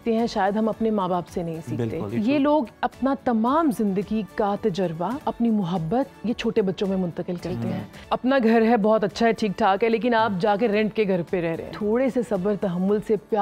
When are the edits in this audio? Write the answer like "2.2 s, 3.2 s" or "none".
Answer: 2.1 s, 5.2 s, 8.0 s, 11.7 s